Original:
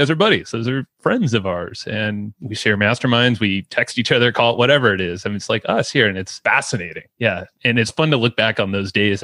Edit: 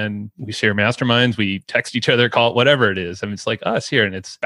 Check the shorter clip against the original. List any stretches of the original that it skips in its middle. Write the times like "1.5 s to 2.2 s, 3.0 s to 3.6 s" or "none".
none

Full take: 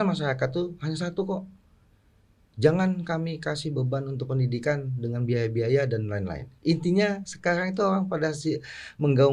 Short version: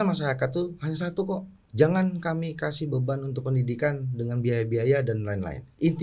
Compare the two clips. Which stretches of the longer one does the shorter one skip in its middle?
1.6 s to 2.4 s

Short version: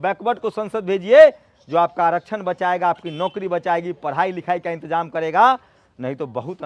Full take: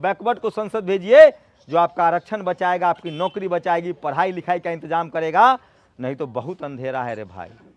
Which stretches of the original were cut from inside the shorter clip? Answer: none

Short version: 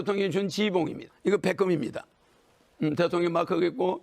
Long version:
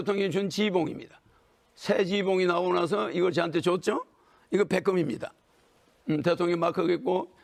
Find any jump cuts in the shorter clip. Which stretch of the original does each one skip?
1.1 s to 4.3 s

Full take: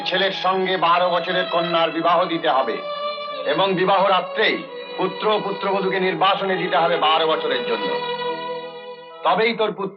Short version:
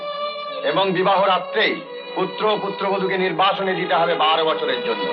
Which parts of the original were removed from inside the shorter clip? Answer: none

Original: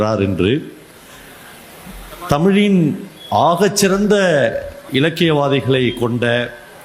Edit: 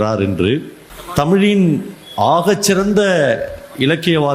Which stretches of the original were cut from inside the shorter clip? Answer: 1.3 s to 2.4 s

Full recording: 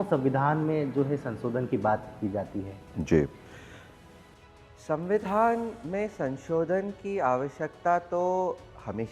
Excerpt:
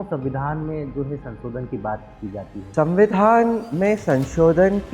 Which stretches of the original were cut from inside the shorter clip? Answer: 2.7 s to 4.8 s

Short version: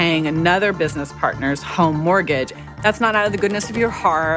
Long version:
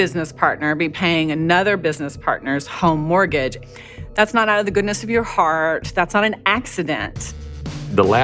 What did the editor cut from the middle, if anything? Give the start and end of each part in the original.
3.7 s to 4.0 s

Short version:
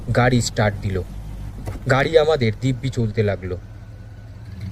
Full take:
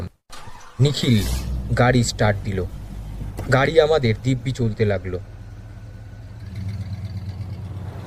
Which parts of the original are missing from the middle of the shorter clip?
5.3 s to 5.6 s

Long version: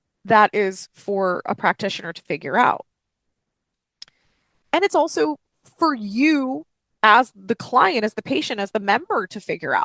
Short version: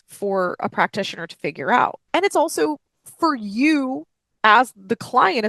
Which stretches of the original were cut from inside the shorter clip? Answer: 2.9 s to 4.6 s

